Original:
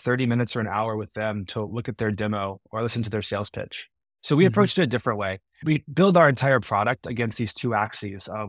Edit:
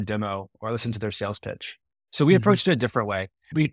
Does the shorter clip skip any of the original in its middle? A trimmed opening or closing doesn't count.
no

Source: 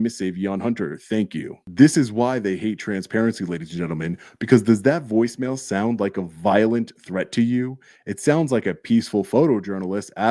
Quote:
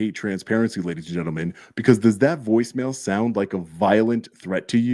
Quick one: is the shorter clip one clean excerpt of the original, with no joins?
yes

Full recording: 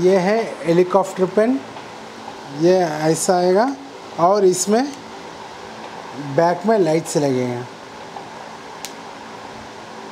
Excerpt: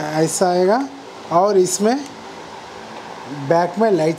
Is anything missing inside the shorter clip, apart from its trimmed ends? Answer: no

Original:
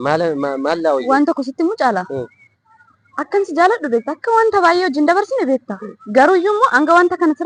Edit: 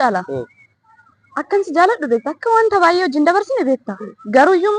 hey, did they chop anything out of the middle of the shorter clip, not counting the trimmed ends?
no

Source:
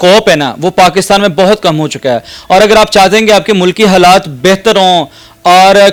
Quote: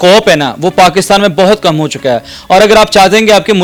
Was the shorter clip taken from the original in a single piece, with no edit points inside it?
yes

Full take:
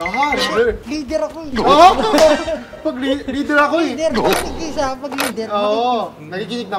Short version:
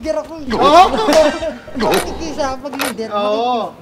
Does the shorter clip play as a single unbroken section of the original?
no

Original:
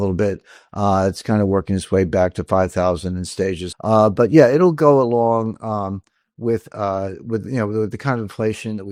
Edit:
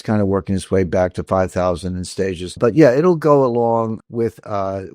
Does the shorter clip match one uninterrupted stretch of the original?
no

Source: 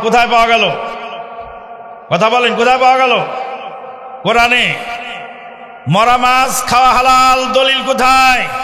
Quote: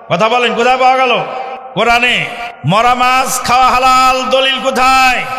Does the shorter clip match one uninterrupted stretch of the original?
no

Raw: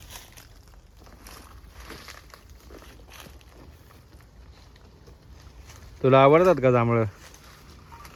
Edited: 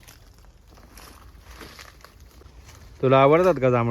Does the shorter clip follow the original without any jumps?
no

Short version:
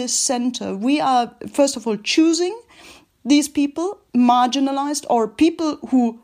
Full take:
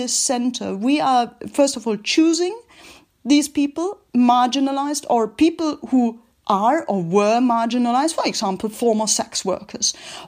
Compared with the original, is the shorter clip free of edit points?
yes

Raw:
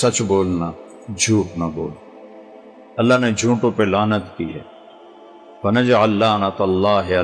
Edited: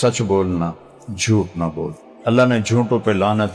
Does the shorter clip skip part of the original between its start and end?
yes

